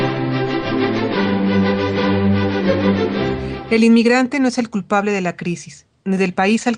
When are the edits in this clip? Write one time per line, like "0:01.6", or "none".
none